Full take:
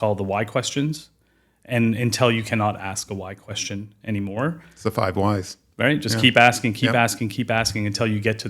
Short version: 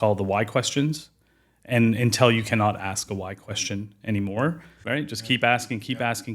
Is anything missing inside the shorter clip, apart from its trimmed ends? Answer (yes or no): yes